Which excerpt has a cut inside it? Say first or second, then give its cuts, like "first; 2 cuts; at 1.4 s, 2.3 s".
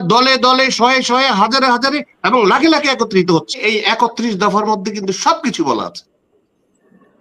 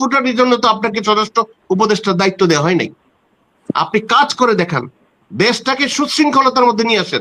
first; 1 cut; at 3.6 s